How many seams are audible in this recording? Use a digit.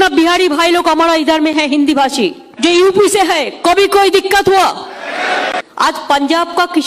2